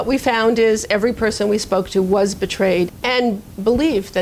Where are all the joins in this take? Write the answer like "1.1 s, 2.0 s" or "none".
2.9 s

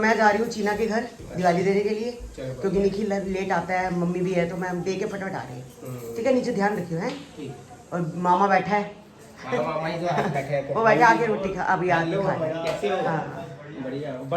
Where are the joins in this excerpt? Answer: none

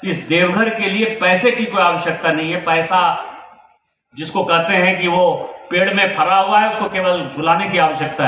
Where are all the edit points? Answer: none

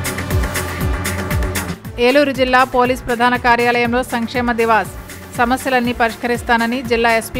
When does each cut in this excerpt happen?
1.7 s

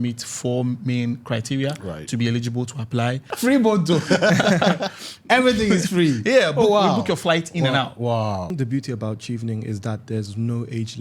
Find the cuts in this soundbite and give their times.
3.3 s, 8.5 s

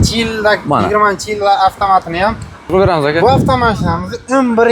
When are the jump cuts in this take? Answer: 2.6 s

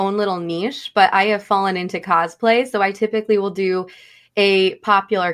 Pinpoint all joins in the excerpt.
none

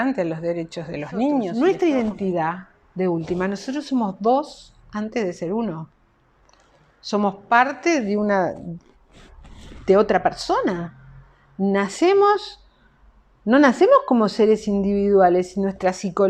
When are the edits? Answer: 1.5 s

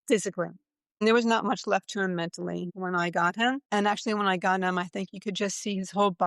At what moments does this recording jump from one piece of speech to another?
1.0 s, 2.7 s, 3.6 s

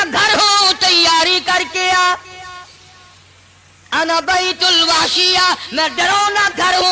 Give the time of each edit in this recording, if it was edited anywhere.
none

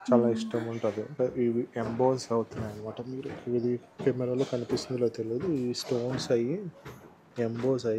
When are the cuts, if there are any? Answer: 1.1 s

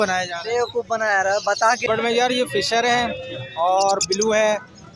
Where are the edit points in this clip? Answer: 1.8 s

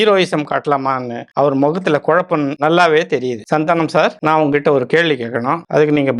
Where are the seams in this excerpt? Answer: none

